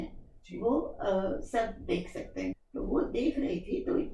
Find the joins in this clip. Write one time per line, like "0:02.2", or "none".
0:02.5